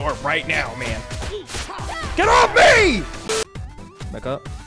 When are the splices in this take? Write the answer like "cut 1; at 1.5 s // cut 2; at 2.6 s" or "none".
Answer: none